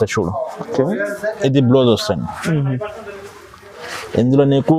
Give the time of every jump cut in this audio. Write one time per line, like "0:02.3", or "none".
none

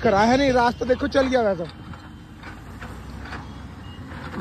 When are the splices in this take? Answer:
none

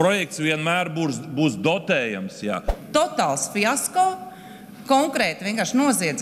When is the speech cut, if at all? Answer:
0:02.7

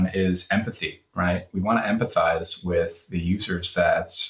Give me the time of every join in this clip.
none

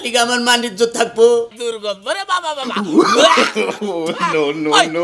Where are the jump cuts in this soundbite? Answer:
0:01.6

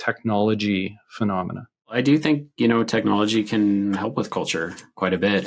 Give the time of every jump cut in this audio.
0:01.9

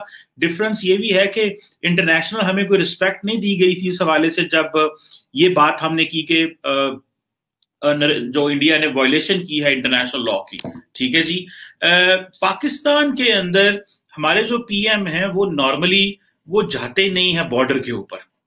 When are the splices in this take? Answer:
none

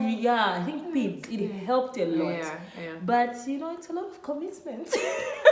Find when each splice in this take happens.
none

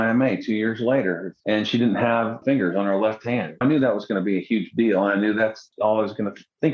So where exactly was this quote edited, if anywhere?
0:01.3
0:02.4
0:03.6
0:05.7

